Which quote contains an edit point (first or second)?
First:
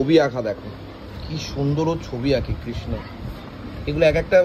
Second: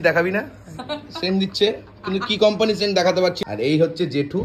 second